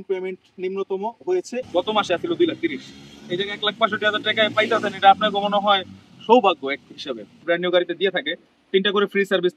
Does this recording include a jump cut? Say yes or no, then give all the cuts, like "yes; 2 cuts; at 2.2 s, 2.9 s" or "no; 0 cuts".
yes; 2 cuts; at 1.7 s, 7.4 s